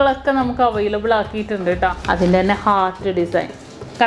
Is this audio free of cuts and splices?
no; 1 cut; at 2.0 s

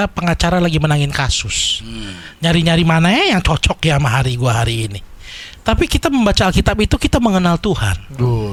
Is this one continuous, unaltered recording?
yes; 0 cuts

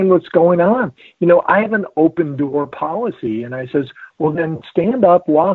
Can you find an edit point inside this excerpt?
no; 0 cuts

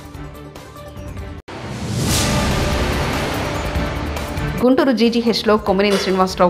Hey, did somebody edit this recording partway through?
yes; 1 cut; at 1.4 s

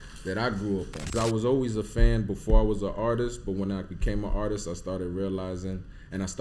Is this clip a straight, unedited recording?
no; 1 cut; at 1.1 s

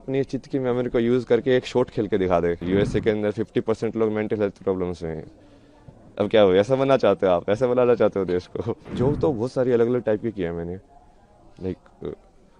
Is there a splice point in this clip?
yes; 2 cuts; at 2.6 s, 8.8 s

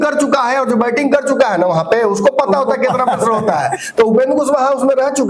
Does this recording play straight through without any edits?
yes; 0 cuts

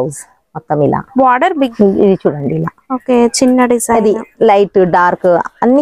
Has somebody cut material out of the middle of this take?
yes; 1 cut; at 1.7 s

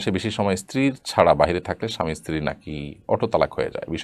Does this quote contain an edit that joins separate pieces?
no; 0 cuts

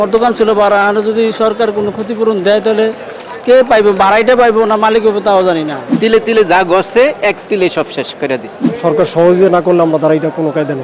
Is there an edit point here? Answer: yes; 2 cuts; at 5.9 s, 8.6 s

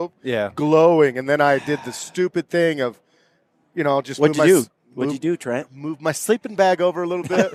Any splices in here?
no; 0 cuts

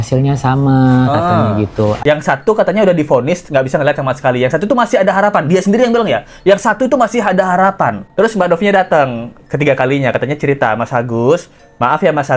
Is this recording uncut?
yes; 0 cuts

